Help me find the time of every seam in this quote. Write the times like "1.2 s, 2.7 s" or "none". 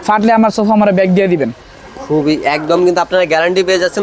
none